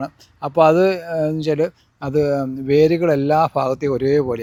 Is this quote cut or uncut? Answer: uncut